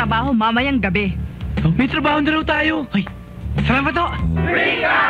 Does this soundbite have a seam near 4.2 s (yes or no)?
yes